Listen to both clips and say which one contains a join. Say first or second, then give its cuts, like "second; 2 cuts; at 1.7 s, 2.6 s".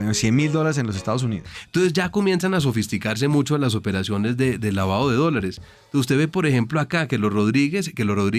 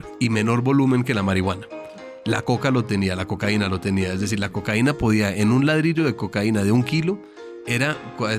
first; 1 cut; at 1.5 s